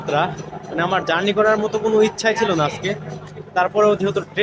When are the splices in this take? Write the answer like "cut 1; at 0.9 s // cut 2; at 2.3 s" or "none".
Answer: none